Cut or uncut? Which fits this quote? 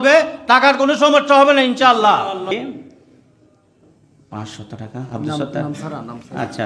cut